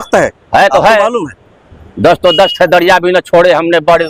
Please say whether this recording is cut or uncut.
uncut